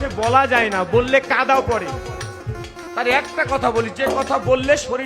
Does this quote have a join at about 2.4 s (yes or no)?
yes